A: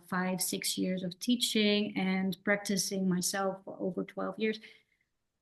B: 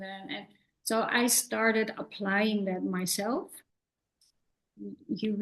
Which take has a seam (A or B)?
B